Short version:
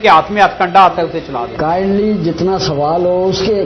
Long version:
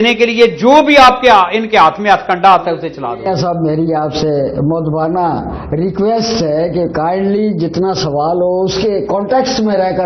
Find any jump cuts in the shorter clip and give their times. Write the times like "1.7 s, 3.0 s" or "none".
1.5 s